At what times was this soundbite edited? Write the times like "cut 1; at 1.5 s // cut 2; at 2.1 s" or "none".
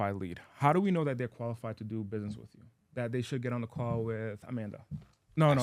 none